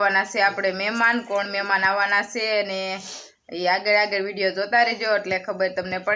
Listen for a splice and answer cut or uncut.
uncut